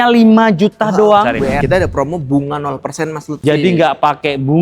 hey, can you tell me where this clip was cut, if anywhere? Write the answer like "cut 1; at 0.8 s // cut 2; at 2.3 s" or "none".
cut 1; at 1.6 s